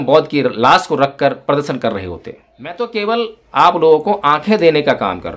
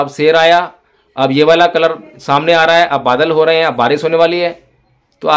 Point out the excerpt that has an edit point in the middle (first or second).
first